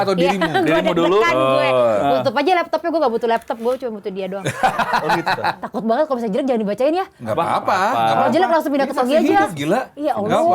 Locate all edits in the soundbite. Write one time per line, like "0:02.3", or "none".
0:05.7

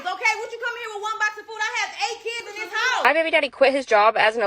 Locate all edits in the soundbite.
0:03.0

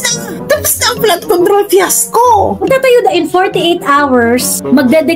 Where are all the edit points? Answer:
none

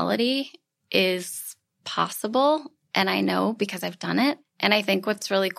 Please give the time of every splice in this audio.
0:04.5

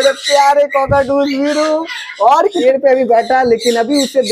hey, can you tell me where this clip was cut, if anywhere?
0:02.6

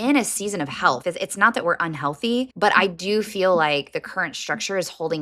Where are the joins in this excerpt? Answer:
0:01.0
0:02.5

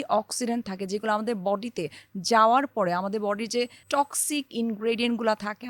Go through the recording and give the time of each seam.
0:03.8

